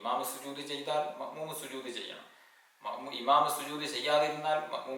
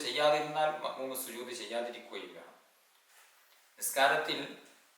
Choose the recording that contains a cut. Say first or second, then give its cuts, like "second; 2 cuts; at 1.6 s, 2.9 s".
second; 1 cut; at 3.1 s